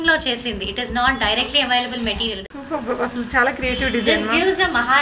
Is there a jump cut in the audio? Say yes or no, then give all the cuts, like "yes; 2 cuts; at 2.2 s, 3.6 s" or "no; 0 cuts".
yes; 1 cut; at 2.4 s